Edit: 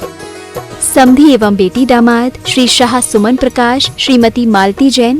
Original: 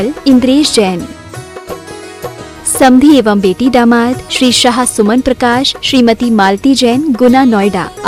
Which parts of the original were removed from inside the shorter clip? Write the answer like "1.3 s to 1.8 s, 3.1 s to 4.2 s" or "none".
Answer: 2.6 s to 2.8 s